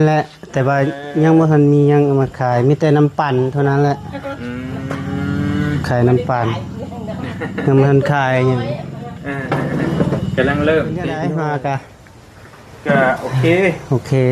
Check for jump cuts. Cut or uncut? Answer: cut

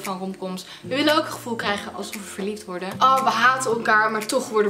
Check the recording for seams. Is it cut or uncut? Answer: cut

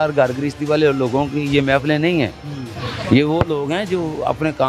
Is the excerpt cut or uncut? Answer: uncut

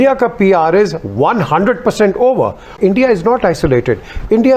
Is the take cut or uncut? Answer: cut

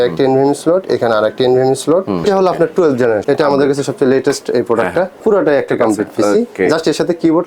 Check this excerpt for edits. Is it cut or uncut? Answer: cut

